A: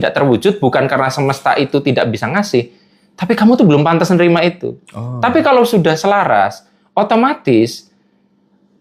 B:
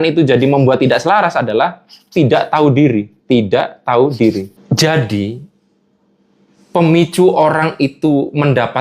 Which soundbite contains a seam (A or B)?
B